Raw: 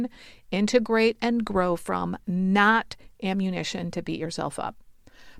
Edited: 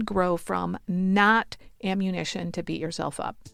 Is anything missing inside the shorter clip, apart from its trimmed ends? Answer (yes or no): no